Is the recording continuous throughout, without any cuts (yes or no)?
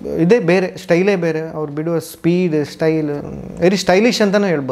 yes